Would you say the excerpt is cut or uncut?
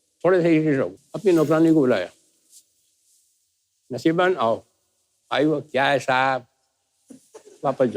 cut